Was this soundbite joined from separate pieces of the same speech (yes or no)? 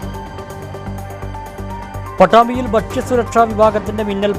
yes